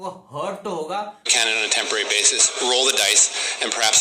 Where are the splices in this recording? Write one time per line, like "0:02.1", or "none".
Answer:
0:01.4